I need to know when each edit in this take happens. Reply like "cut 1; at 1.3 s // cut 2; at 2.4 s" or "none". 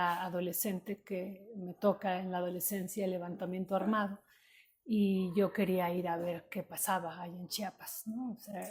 none